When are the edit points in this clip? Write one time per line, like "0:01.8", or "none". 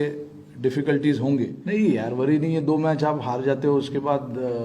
0:01.6